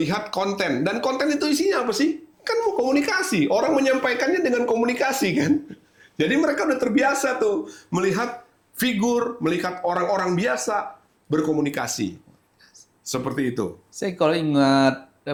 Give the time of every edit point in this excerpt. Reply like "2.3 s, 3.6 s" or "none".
none